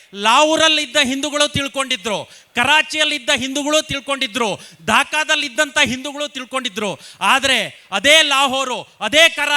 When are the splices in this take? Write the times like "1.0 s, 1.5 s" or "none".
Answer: none